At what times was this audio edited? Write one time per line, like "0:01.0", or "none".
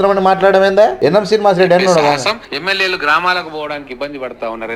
0:01.0
0:02.5